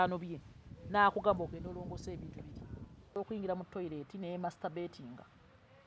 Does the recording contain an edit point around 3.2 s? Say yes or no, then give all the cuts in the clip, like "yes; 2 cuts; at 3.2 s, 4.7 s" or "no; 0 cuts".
yes; 1 cut; at 3.2 s